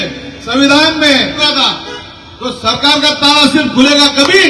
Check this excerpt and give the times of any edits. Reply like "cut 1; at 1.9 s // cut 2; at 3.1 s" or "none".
cut 1; at 1.4 s

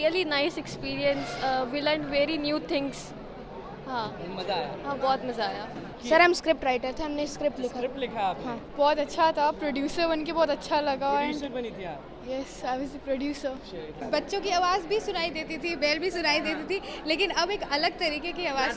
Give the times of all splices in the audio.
cut 1; at 5.9 s // cut 2; at 8.6 s // cut 3; at 14.0 s

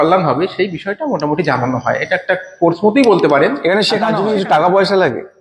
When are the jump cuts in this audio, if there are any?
cut 1; at 4.1 s

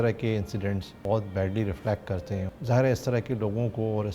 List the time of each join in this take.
cut 1; at 0.9 s // cut 2; at 2.5 s

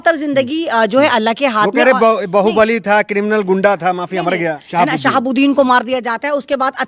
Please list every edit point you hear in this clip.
cut 1; at 4.6 s

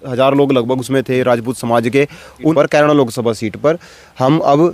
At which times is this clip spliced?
cut 1; at 2.5 s

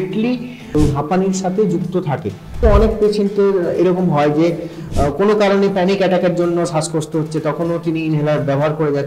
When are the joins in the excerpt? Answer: cut 1; at 0.7 s // cut 2; at 2.6 s

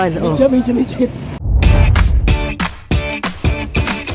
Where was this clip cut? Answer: cut 1; at 1.3 s

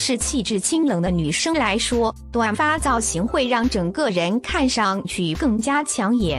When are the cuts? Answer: none

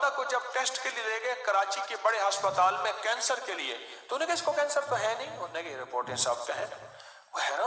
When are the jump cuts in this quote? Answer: cut 1; at 4.5 s

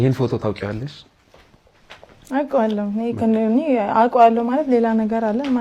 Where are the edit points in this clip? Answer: none

